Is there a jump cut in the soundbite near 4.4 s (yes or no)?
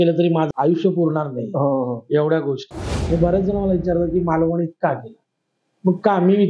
no